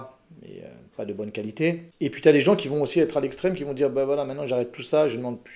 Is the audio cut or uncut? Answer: cut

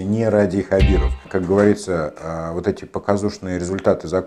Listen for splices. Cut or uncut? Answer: cut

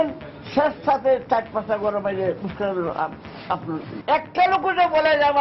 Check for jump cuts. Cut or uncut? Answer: uncut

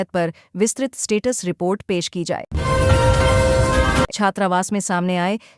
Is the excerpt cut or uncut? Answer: uncut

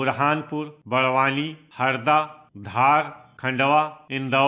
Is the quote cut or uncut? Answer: uncut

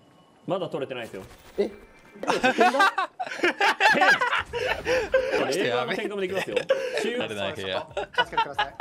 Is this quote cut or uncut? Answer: cut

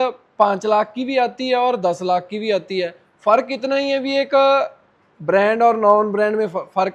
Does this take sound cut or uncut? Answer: uncut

